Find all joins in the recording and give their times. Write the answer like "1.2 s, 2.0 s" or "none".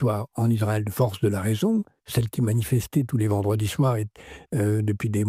2.0 s